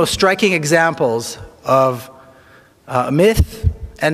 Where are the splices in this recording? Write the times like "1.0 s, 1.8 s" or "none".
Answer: none

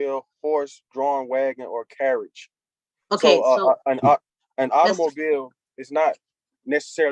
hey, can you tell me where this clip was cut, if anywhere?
none

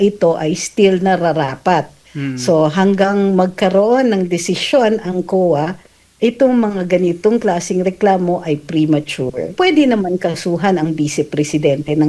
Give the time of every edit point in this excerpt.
9.5 s

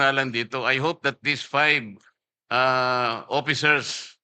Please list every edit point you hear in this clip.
none

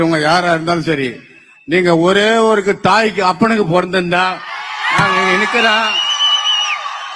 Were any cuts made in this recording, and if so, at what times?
none

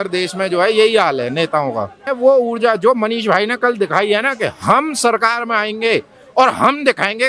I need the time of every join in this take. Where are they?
2.1 s

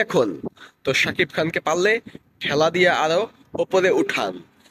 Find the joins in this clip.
none

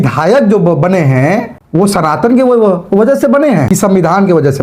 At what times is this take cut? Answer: 1.6 s, 3.7 s

